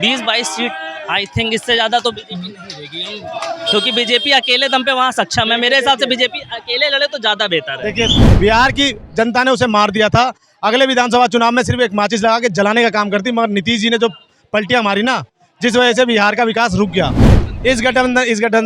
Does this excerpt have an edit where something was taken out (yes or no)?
yes